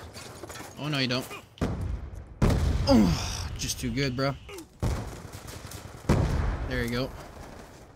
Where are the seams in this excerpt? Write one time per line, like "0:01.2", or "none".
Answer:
none